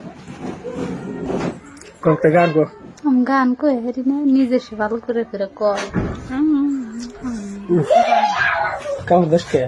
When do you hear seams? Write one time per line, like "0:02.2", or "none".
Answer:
0:01.2